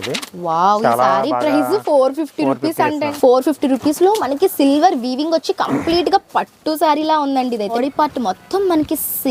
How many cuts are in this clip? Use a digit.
2